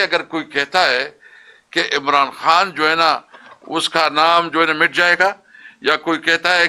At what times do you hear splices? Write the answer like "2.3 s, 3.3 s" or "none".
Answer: none